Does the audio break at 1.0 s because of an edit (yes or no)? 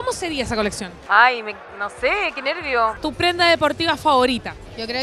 no